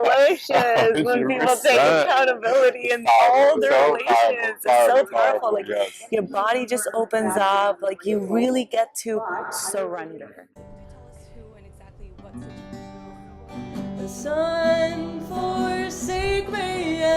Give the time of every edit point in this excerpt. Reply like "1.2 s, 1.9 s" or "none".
10.2 s